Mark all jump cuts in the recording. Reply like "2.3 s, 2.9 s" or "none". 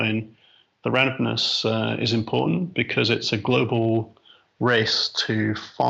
none